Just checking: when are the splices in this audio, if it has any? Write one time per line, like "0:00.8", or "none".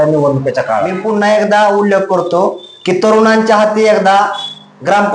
0:00.9